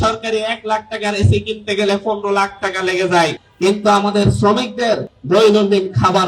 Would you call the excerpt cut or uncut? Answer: cut